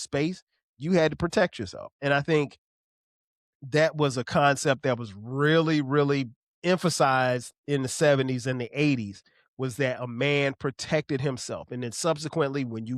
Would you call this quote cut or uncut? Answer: cut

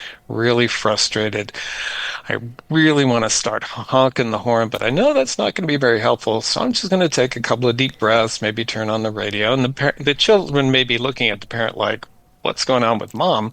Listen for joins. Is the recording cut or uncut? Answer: uncut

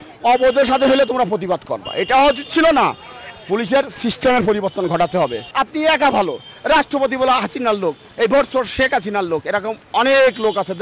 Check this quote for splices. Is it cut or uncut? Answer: cut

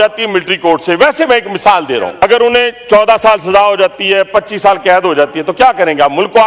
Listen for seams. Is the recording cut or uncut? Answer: cut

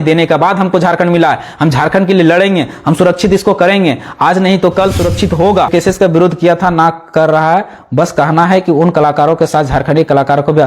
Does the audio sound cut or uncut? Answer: cut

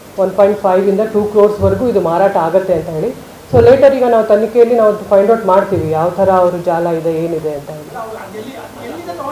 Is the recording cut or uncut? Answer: uncut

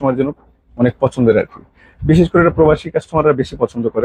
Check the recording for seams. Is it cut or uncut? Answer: uncut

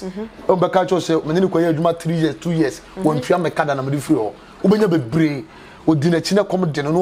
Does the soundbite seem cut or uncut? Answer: uncut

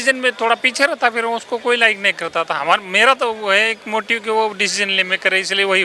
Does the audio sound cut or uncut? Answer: uncut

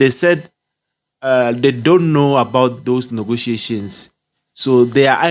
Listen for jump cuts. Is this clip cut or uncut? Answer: uncut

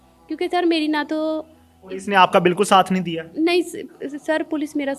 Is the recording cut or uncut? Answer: uncut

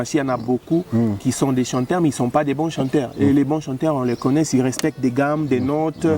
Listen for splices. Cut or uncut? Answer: uncut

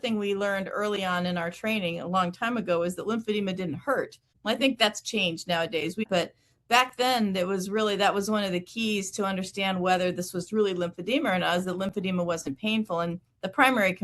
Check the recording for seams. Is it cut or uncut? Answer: cut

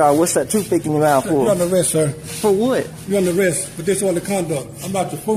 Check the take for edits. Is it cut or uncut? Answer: uncut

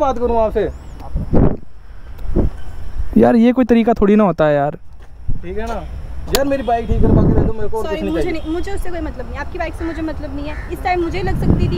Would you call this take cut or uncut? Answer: uncut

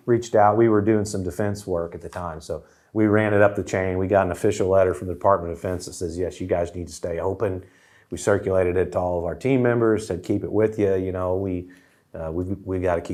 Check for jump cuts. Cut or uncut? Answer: uncut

